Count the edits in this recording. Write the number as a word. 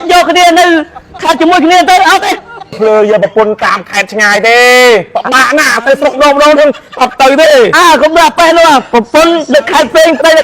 one